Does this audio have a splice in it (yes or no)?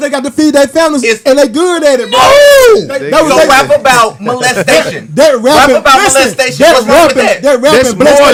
no